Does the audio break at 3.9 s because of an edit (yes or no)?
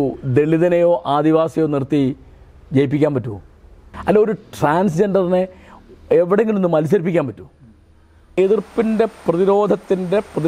yes